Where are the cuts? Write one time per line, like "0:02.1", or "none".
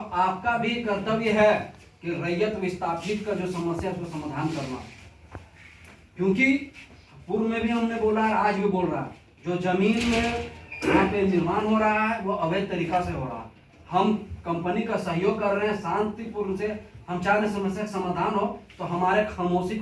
none